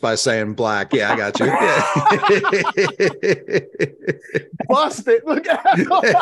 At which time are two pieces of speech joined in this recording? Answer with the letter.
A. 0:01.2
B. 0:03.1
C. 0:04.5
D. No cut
D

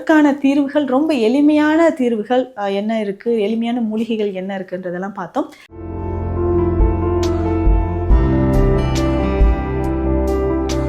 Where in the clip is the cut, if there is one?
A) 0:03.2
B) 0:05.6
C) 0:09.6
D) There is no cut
B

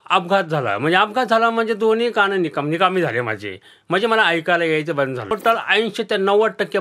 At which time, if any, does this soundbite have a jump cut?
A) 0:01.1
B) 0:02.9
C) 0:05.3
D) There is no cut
C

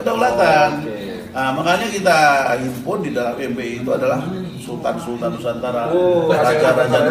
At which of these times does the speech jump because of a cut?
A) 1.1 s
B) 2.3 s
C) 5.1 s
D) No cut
D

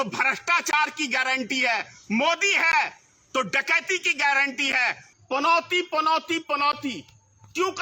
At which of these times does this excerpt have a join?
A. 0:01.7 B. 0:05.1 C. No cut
B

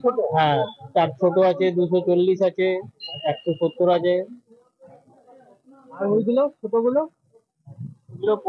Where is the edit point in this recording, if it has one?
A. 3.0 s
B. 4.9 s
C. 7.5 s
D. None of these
D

